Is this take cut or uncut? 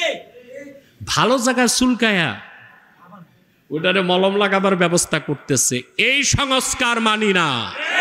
uncut